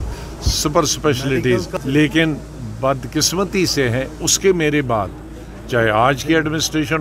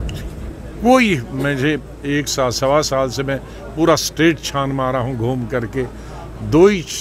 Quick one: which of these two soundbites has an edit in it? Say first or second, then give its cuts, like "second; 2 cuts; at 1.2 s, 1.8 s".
first; 1 cut; at 1.7 s